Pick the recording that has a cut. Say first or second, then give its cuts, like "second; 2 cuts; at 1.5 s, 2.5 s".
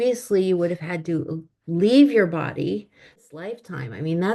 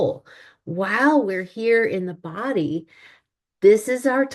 first; 1 cut; at 3.2 s